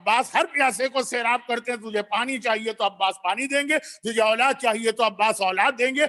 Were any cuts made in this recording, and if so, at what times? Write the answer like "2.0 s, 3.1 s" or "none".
none